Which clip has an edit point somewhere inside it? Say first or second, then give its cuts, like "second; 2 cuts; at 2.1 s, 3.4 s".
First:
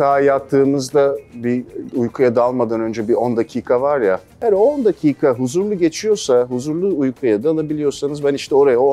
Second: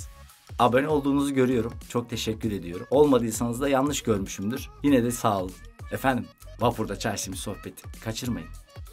first; 1 cut; at 4.4 s